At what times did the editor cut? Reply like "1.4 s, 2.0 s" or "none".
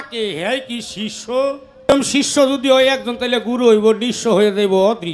1.9 s